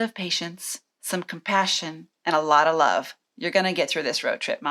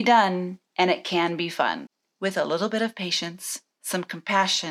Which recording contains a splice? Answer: first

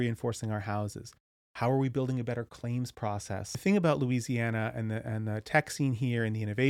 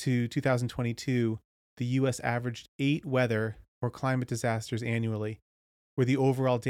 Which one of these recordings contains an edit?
first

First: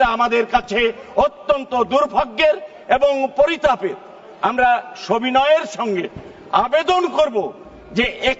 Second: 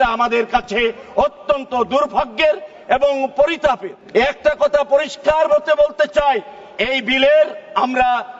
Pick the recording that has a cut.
second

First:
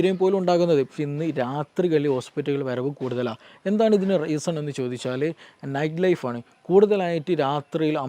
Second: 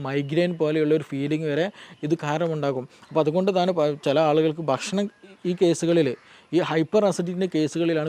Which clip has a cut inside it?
first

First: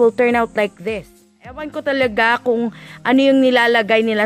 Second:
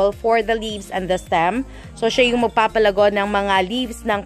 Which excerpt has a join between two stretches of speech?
first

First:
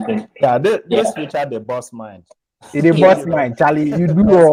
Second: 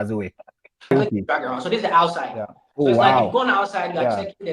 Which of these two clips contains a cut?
second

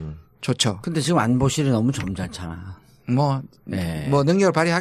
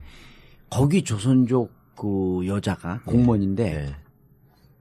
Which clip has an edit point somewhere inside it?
first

